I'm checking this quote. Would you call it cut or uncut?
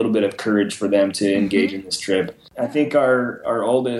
cut